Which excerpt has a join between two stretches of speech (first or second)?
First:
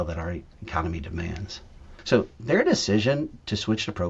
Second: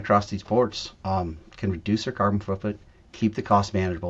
first